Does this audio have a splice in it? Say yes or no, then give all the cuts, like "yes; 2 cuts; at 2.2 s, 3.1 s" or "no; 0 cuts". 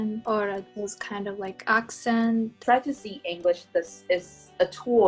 yes; 1 cut; at 2.5 s